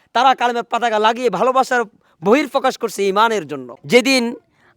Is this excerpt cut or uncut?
cut